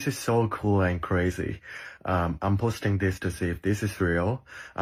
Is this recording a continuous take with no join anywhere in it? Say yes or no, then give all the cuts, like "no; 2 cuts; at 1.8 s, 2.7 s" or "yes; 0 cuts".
yes; 0 cuts